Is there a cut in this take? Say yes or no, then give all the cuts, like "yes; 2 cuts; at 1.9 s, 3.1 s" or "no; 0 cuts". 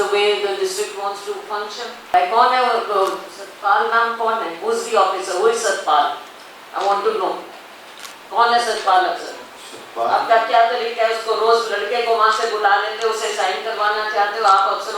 yes; 1 cut; at 2.1 s